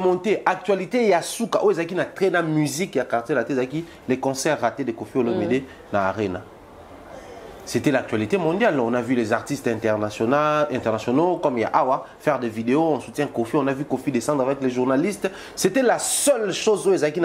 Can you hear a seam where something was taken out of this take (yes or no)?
no